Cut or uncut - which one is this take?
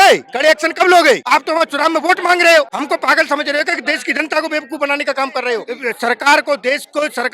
cut